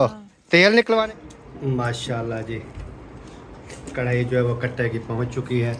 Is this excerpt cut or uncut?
cut